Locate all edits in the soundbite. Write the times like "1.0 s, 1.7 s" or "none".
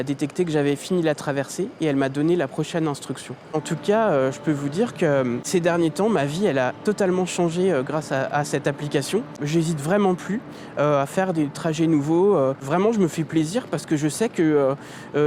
3.5 s, 5.5 s, 9.4 s, 12.7 s

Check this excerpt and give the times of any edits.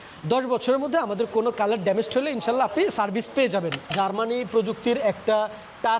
3.9 s

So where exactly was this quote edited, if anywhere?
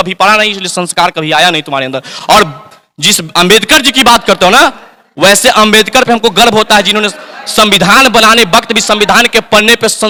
none

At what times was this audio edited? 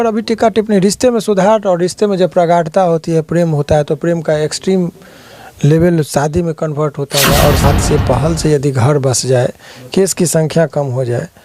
7.6 s

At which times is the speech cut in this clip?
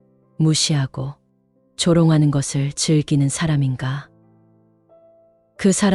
none

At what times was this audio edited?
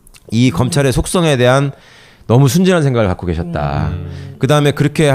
2.2 s

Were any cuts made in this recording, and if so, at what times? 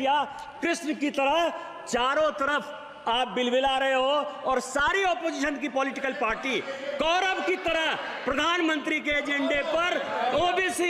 none

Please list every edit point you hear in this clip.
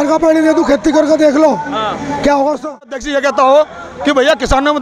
3.0 s

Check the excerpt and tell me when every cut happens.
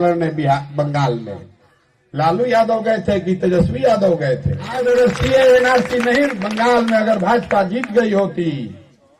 4.7 s

